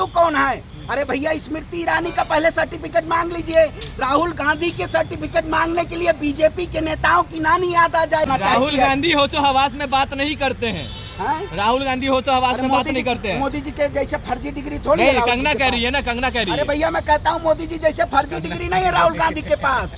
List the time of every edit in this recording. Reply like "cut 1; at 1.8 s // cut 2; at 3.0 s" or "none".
cut 1; at 8.3 s